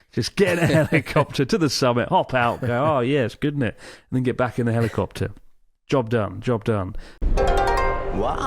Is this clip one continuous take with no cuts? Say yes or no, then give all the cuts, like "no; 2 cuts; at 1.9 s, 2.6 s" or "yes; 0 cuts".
no; 1 cut; at 7.2 s